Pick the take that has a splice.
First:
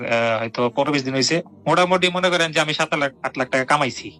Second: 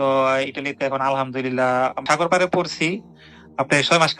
second; 1 cut; at 2.0 s

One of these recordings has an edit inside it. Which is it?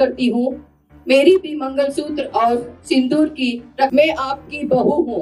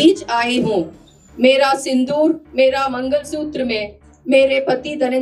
first; 1 cut; at 3.9 s

